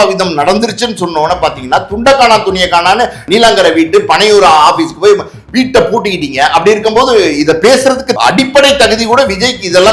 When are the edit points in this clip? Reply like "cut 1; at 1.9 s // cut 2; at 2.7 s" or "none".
cut 1; at 3.2 s // cut 2; at 8.1 s